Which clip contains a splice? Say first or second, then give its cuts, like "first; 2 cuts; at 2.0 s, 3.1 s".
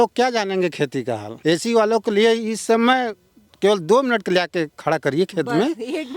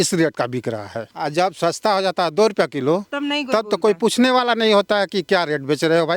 second; 1 cut; at 1.1 s